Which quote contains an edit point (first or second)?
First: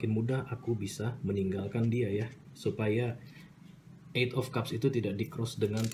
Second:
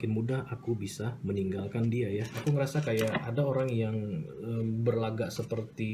second